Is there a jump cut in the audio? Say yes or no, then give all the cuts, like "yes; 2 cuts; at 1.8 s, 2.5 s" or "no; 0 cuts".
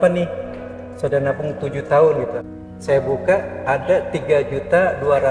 yes; 1 cut; at 2.4 s